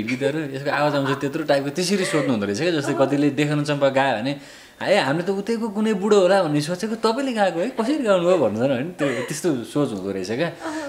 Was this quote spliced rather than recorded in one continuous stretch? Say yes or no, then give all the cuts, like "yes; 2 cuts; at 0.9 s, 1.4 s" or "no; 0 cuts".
no; 0 cuts